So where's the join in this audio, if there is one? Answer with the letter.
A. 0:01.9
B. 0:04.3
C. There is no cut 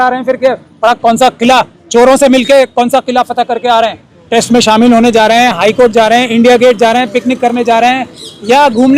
B